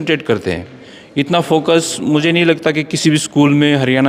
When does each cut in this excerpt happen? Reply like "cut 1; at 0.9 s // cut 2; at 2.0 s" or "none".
none